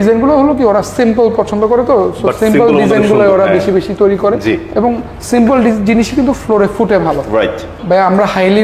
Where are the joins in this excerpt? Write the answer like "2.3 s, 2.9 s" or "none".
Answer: 7.7 s